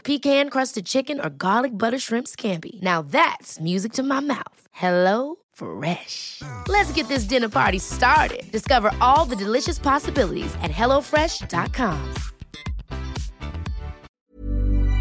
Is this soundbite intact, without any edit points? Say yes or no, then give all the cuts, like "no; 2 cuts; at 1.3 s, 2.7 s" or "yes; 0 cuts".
no; 1 cut; at 14.1 s